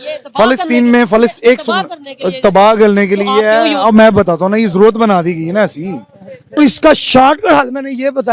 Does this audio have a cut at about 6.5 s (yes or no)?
yes